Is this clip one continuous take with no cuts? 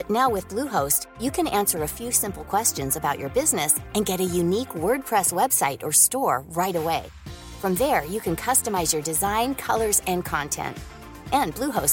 yes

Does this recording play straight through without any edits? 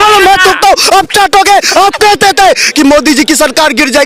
no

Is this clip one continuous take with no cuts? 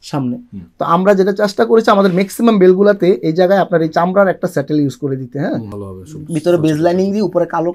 no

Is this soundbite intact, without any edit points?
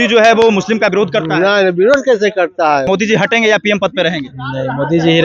no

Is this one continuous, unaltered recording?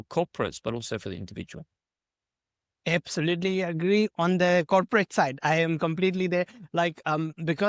yes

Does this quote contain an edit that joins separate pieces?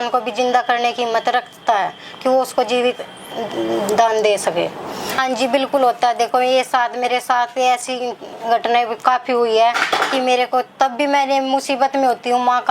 yes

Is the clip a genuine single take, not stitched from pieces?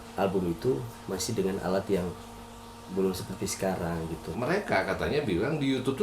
no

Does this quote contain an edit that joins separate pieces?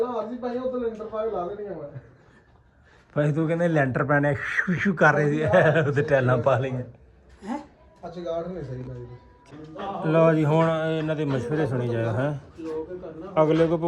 yes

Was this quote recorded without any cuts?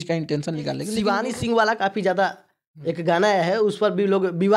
no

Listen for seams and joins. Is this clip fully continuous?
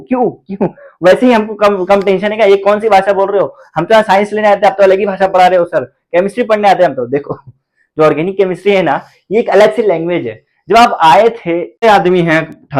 no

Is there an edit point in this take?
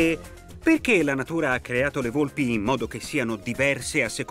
yes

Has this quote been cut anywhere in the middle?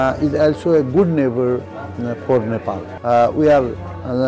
yes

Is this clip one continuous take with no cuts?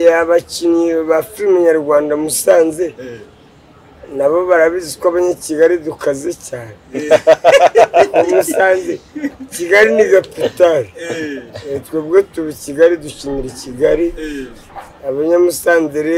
yes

